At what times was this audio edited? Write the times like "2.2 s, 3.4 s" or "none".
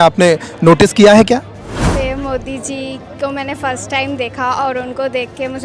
1.9 s